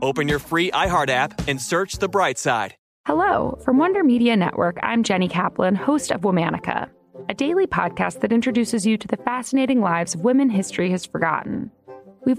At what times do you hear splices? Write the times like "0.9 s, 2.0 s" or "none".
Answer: 2.8 s